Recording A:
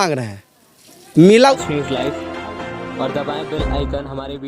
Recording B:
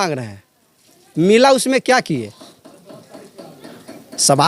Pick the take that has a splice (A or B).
A